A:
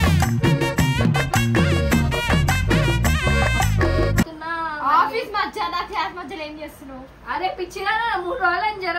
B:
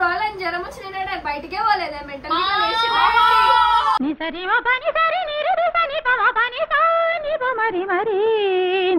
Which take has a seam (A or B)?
A